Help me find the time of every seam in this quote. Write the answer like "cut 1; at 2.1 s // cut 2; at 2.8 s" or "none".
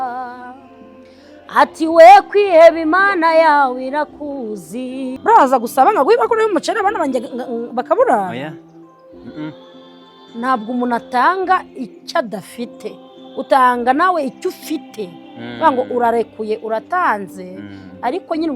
cut 1; at 5.2 s